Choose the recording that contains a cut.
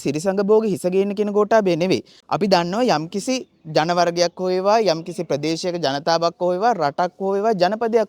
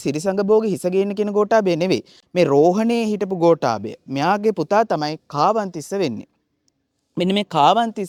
first; 1 cut; at 2.2 s

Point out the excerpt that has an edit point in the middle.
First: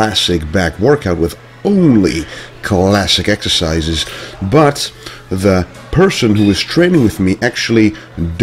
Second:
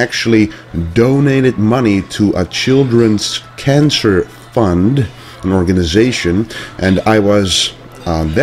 second; 1 cut; at 6.8 s

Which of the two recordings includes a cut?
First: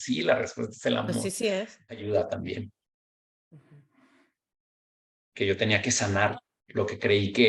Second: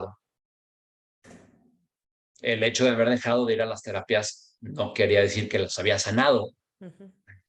first; 1 cut; at 2.0 s

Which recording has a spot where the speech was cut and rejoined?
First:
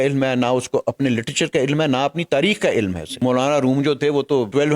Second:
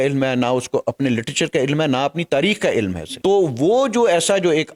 first; 1 cut; at 3.2 s

